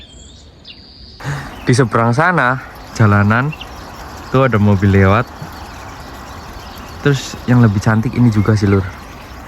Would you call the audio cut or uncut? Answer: cut